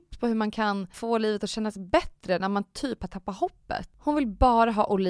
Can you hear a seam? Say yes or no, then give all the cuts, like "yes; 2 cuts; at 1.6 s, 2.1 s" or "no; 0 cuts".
yes; 2 cuts; at 0.9 s, 3.9 s